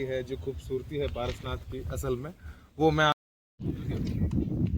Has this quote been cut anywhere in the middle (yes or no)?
yes